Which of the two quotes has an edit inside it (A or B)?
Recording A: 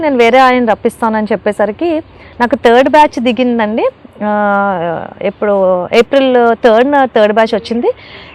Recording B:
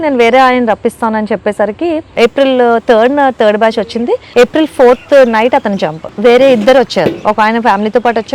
B